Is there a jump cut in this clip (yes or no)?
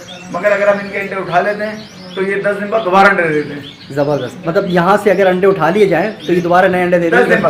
no